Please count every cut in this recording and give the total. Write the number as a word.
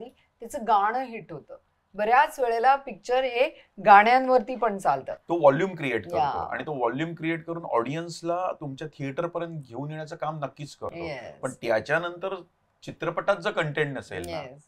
zero